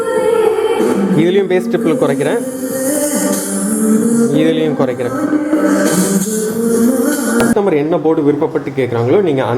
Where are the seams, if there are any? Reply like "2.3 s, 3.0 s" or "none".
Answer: 7.5 s